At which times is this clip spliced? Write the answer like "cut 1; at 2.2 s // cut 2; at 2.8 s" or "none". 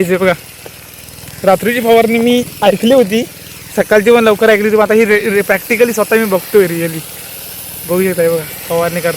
none